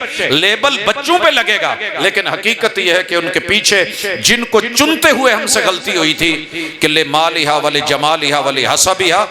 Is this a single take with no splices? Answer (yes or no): yes